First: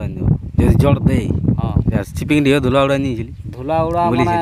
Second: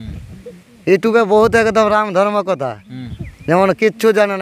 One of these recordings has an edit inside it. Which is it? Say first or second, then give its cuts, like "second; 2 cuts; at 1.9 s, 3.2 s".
first; 1 cut; at 2.0 s